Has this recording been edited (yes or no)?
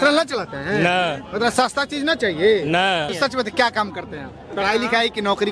yes